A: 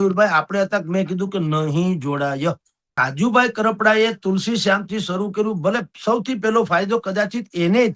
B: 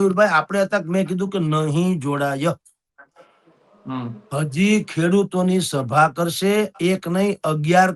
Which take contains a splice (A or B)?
A